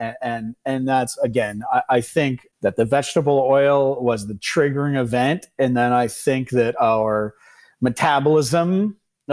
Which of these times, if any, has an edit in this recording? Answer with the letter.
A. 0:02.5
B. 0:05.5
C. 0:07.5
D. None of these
A